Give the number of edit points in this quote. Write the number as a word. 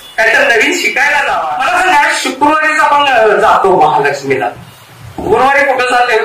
one